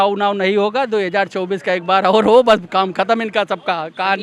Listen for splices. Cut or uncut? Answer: uncut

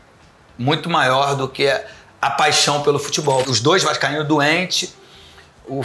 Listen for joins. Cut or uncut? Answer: cut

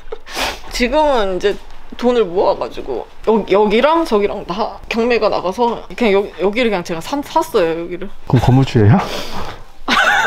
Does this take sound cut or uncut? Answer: uncut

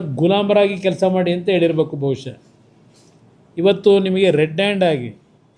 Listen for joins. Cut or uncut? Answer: uncut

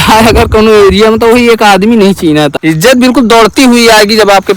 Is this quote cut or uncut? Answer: cut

